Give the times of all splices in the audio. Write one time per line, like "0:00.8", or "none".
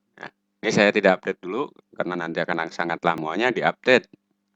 0:03.2